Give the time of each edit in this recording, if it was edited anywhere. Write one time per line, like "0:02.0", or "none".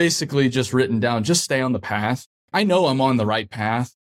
0:02.3